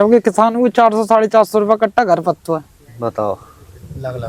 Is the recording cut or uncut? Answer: uncut